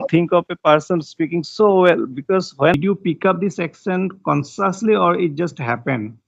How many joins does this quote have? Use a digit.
1